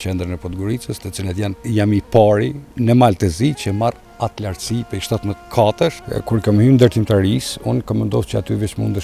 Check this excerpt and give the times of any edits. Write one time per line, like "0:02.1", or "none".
0:01.6
0:02.6
0:05.5
0:06.1